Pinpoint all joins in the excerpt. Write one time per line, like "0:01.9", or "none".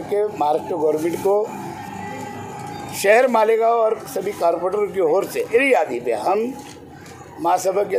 0:05.5

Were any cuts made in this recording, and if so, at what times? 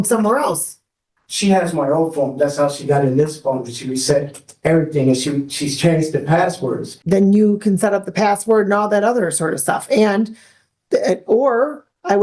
0:06.9

